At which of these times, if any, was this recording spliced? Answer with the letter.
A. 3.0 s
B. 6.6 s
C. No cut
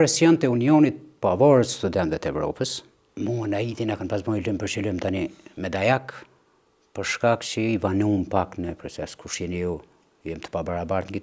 A